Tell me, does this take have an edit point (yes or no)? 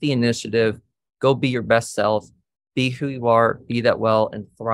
no